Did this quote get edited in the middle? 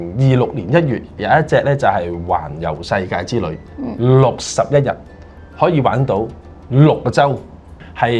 no; 0 cuts

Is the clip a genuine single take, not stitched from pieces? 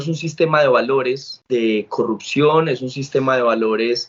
yes; 0 cuts

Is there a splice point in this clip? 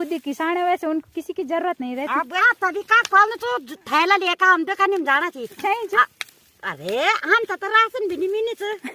yes; 2 cuts; at 2.4 s, 5.6 s

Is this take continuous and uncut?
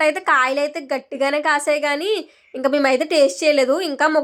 yes; 0 cuts

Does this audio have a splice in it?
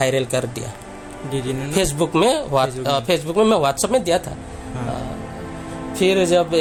no; 0 cuts

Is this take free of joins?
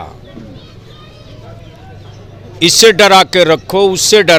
yes; 0 cuts

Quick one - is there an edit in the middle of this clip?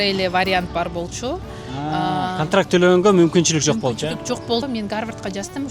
yes; 1 cut; at 4.6 s

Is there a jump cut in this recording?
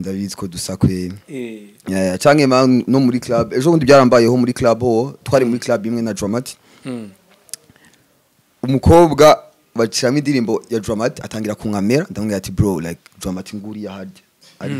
no; 0 cuts

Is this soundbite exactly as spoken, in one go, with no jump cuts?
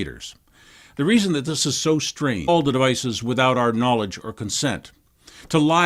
yes; 0 cuts

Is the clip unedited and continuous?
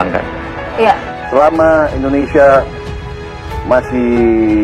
no; 1 cut; at 1.1 s

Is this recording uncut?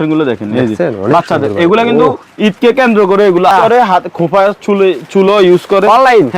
no; 1 cut; at 3.5 s

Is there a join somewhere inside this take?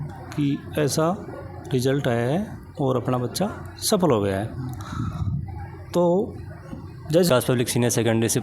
yes; 1 cut; at 7.3 s

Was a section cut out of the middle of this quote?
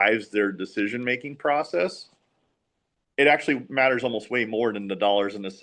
no; 0 cuts

